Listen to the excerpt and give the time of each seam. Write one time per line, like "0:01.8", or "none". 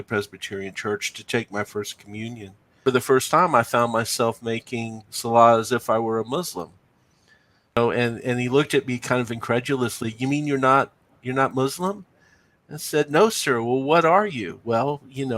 0:02.6
0:07.8